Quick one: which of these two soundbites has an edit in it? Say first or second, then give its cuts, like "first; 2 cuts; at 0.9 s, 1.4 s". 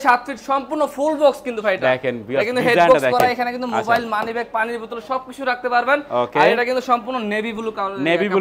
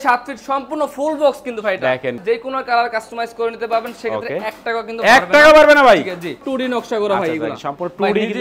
second; 2 cuts; at 2.2 s, 6.4 s